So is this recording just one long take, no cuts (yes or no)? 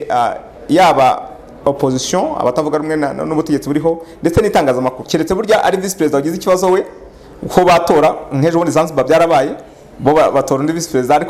no